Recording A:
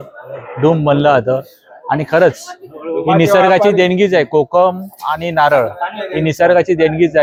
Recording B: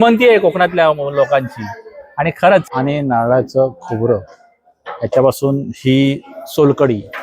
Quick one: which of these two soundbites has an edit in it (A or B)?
B